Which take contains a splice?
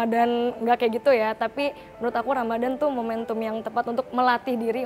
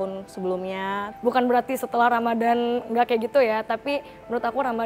second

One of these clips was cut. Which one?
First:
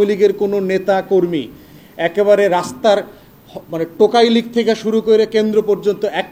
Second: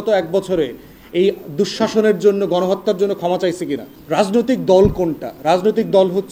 second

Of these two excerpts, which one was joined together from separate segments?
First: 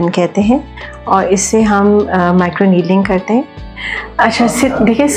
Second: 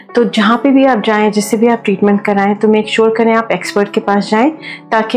first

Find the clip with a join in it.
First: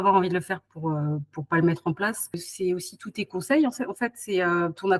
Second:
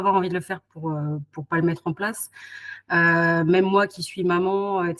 first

